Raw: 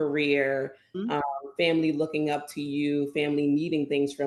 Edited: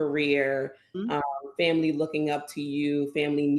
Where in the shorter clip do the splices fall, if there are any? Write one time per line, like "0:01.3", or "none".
none